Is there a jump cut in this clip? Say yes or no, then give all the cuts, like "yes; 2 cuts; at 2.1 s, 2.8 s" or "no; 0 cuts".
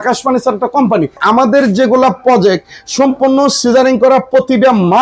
yes; 1 cut; at 1.2 s